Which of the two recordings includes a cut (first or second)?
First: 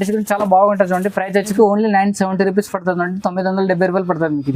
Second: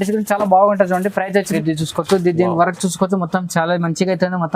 second